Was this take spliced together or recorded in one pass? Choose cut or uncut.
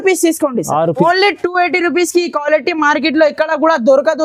cut